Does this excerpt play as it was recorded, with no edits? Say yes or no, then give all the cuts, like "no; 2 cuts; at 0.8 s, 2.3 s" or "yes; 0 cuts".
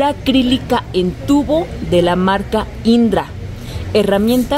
yes; 0 cuts